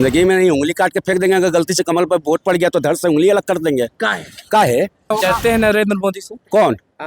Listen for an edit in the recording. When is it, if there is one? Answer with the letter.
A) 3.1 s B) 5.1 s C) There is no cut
B